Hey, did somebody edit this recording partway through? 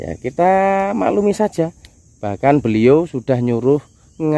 no; 0 cuts

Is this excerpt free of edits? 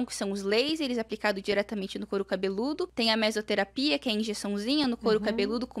no; 1 cut; at 2.9 s

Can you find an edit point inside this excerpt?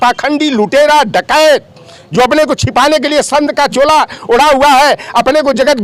no; 0 cuts

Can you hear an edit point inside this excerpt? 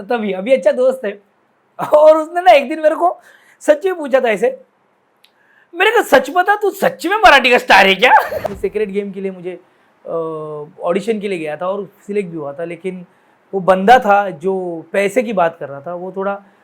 yes; 1 cut; at 8.4 s

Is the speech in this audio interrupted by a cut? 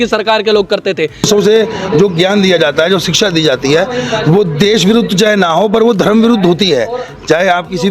yes; 1 cut; at 1.3 s

